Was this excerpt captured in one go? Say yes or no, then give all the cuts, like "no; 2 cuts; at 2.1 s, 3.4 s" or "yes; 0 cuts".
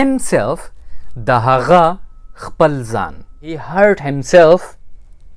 no; 1 cut; at 3.6 s